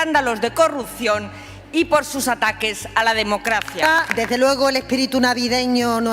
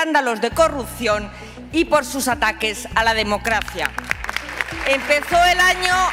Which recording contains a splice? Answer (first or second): first